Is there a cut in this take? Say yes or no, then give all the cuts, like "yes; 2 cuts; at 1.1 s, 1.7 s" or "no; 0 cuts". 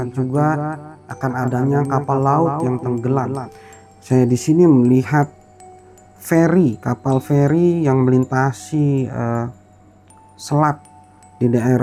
no; 0 cuts